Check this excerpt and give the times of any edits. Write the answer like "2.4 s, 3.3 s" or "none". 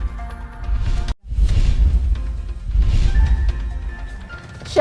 1.1 s